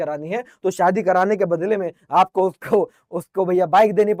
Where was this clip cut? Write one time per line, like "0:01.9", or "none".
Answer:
none